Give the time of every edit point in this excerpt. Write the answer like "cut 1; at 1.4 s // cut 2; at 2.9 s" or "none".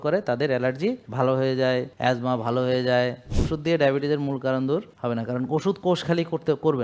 cut 1; at 1.0 s // cut 2; at 1.9 s // cut 3; at 3.3 s // cut 4; at 4.9 s